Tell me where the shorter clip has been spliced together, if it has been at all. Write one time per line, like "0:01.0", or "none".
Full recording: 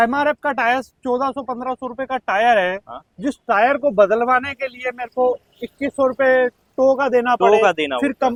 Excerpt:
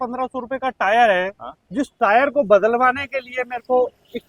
none